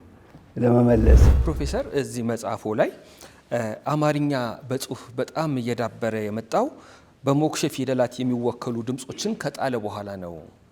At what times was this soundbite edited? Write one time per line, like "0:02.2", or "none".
0:01.4